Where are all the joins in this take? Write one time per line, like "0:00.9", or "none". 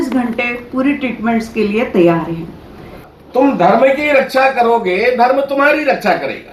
0:03.0